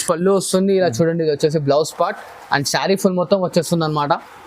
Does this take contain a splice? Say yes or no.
no